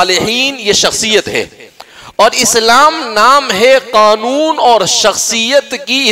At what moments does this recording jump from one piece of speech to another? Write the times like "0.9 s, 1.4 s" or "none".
none

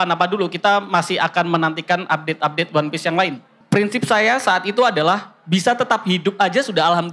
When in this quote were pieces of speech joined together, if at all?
3.5 s

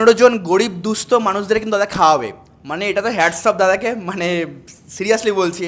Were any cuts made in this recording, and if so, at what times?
none

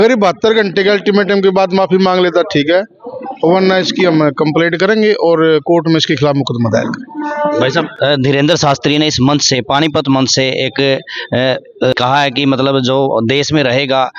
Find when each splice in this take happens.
none

